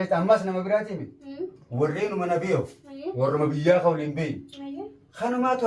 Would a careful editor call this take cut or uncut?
uncut